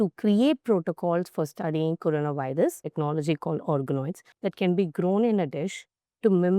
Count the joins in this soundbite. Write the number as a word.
two